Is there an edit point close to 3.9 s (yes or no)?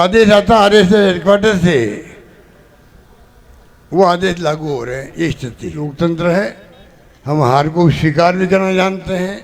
no